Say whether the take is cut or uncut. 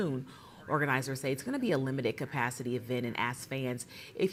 uncut